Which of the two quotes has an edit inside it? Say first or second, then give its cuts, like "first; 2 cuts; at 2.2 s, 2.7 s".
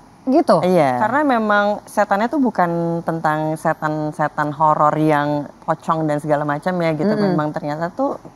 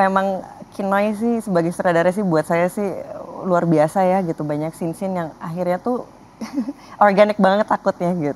first; 1 cut; at 1.0 s